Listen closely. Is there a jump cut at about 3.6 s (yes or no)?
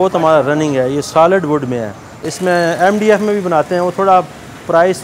no